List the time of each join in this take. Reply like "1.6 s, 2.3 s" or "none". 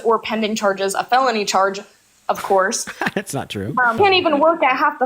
3.9 s

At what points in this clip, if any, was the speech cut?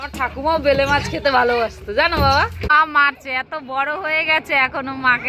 2.7 s

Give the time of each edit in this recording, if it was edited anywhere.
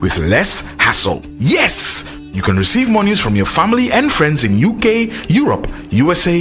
none

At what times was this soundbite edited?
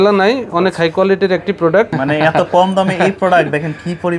1.9 s

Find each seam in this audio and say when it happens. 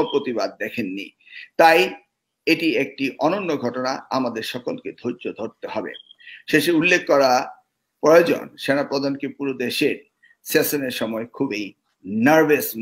none

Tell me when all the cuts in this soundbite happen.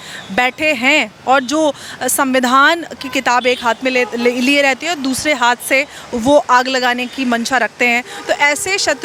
none

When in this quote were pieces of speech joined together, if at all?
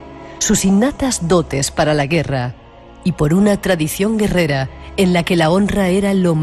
none

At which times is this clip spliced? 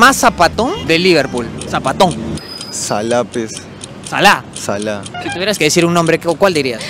2.4 s, 5.1 s

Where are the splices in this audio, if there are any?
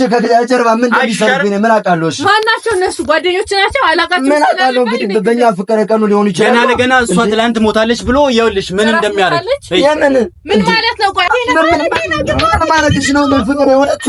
11.3 s

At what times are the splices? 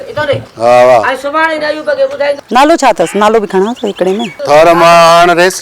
2.4 s, 4.4 s

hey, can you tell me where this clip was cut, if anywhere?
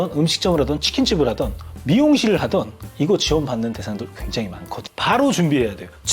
4.9 s

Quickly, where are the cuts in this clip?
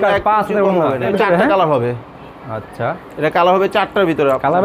1.1 s

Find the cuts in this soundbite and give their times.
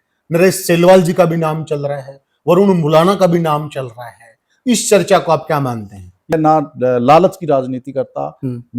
6.3 s

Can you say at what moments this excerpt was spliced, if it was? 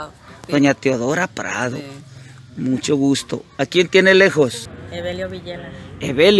4.7 s

